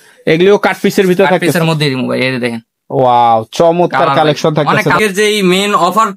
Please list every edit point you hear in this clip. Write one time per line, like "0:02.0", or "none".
0:05.0